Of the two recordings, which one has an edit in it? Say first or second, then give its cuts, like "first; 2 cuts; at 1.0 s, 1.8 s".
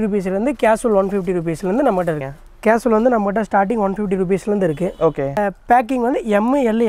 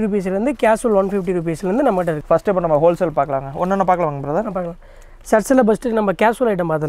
first; 2 cuts; at 2.2 s, 5.4 s